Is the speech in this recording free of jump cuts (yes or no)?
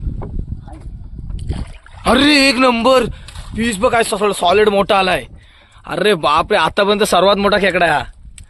yes